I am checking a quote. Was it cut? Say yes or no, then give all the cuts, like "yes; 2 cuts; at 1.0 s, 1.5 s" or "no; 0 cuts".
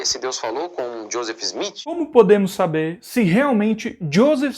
yes; 1 cut; at 2.0 s